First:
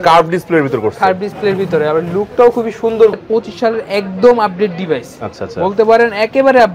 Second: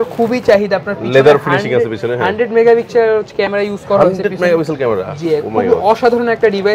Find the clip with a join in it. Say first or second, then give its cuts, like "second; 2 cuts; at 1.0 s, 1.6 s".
first; 1 cut; at 3.1 s